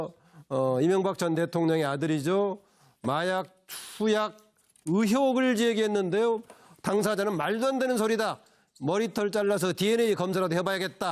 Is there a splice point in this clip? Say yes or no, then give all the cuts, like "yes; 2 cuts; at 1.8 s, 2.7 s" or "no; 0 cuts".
no; 0 cuts